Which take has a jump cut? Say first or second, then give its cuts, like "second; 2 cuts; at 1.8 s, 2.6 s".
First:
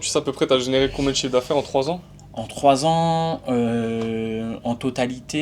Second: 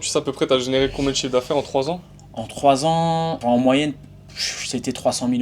second; 1 cut; at 3.4 s